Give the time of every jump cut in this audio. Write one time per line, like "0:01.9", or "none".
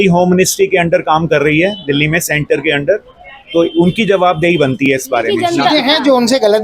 0:05.3